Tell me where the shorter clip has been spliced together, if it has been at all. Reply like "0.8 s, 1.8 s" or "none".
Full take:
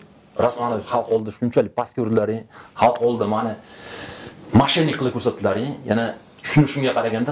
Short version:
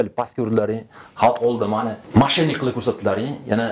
2.0 s